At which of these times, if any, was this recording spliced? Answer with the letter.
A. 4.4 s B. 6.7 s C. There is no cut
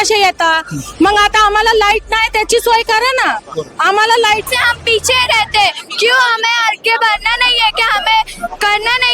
A